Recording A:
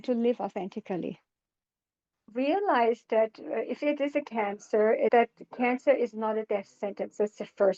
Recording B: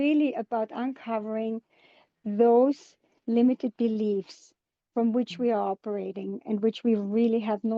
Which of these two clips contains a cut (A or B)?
A